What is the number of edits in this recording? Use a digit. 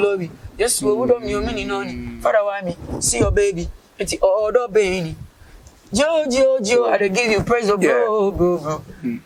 0